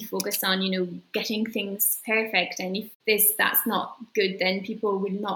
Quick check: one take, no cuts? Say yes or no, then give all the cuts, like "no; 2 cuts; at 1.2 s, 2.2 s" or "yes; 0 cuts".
yes; 0 cuts